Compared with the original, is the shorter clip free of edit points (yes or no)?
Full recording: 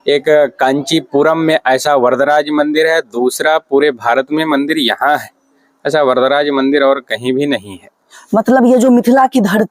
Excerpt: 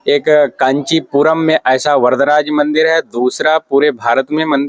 yes